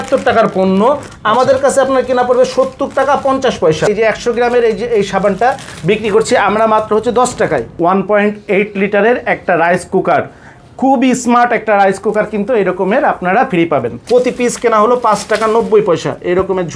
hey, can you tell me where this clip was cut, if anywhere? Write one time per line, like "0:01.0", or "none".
0:03.9
0:07.7
0:13.9